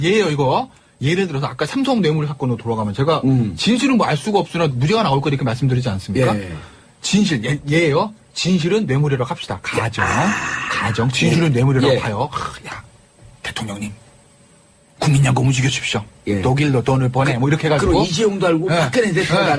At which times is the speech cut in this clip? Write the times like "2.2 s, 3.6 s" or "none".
none